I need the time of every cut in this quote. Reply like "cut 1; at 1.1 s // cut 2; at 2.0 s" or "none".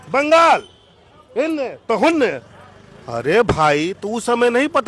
none